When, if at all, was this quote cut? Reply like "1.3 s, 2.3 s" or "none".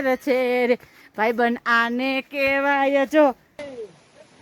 3.4 s

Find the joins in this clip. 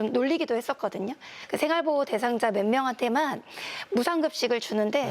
1.3 s

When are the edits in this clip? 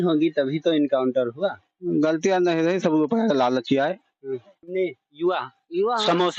4.7 s

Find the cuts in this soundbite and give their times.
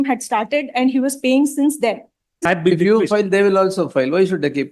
2.4 s

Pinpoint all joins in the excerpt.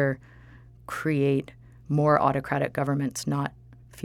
none

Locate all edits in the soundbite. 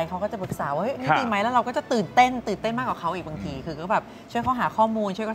none

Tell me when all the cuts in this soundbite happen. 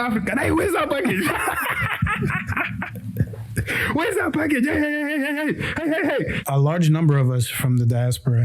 6.4 s

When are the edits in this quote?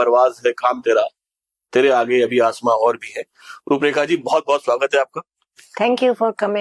none

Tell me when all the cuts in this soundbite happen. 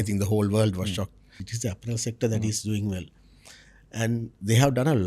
1.5 s

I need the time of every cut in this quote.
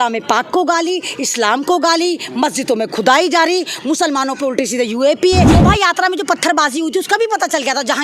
5.5 s

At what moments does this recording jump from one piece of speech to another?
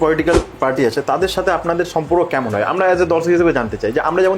none

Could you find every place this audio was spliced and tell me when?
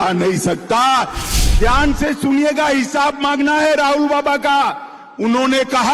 1.2 s

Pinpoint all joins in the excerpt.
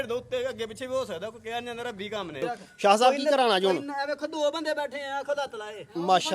2.4 s

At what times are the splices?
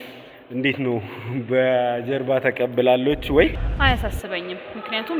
3.7 s

